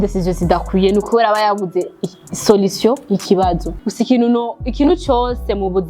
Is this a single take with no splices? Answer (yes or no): no